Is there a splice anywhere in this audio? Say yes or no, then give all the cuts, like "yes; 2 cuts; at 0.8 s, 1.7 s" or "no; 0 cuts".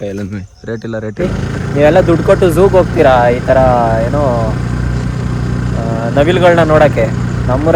yes; 1 cut; at 1.3 s